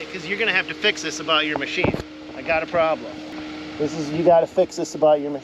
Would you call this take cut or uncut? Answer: uncut